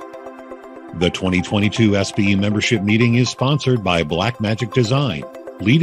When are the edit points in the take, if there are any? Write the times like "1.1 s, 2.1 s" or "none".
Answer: 0.9 s